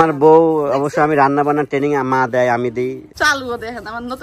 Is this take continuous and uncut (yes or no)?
no